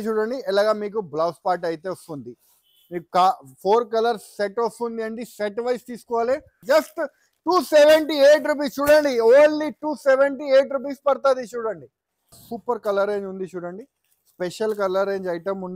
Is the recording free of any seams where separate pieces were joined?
no; 2 cuts; at 6.6 s, 12.5 s

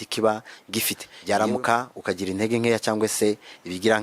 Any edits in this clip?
yes; 1 cut; at 1.1 s

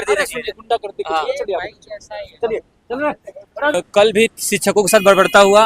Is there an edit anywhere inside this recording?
yes; 1 cut; at 3.7 s

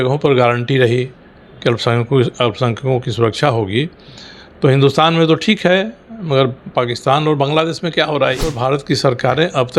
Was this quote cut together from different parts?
yes; 1 cut; at 8.6 s

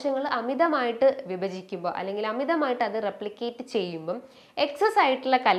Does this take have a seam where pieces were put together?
no; 0 cuts

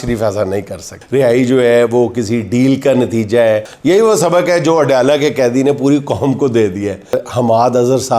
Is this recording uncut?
no; 3 cuts; at 0.9 s, 3.7 s, 7.2 s

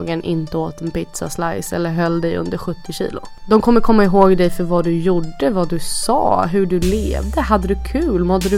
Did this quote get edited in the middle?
yes; 1 cut; at 3.3 s

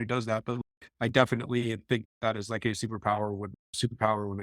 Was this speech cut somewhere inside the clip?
no; 0 cuts

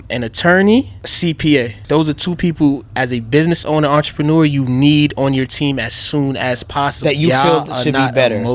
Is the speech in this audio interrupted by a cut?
yes; 3 cuts; at 1.0 s, 1.8 s, 7.0 s

